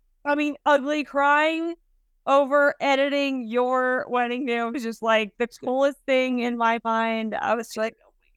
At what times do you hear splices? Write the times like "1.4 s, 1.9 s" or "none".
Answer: none